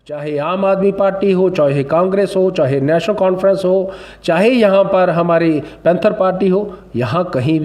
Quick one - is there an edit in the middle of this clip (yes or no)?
no